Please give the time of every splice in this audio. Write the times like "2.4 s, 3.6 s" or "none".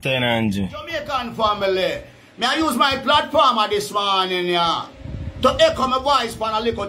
1.1 s